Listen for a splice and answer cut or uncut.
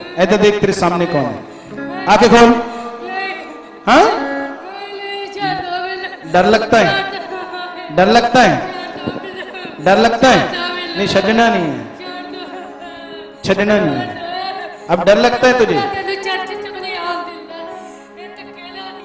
uncut